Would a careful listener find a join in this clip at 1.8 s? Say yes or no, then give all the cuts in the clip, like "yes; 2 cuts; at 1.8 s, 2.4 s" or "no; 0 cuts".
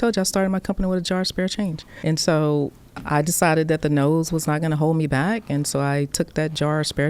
no; 0 cuts